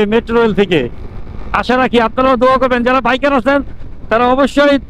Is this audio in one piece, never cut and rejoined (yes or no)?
yes